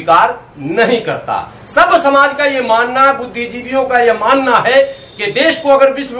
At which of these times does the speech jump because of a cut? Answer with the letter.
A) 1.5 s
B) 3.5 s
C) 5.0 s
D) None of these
D